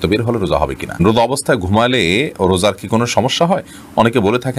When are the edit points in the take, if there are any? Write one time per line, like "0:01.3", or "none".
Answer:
0:01.0